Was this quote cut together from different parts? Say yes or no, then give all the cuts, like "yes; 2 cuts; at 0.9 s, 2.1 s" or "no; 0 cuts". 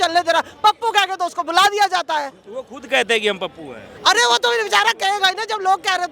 no; 0 cuts